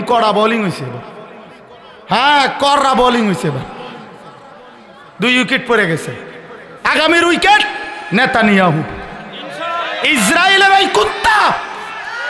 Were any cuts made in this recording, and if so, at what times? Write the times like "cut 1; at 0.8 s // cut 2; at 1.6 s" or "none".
none